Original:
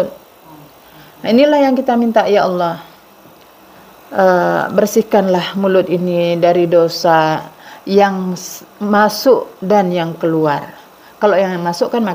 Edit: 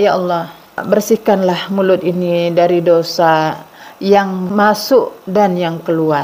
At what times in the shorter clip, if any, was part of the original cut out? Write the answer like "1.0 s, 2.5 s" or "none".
0.8 s, 4.5 s